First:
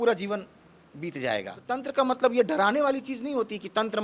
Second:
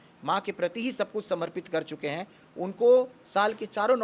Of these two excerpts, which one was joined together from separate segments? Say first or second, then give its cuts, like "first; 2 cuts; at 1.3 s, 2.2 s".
first; 1 cut; at 1.8 s